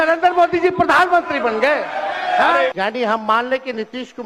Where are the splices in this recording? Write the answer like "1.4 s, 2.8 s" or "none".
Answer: 2.7 s